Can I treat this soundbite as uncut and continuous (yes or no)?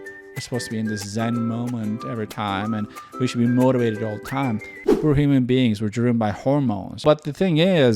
no